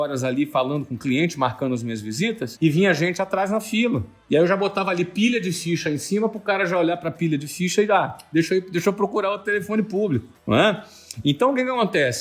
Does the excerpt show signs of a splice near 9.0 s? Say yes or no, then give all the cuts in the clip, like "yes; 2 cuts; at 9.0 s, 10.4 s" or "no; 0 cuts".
no; 1 cut; at 2.5 s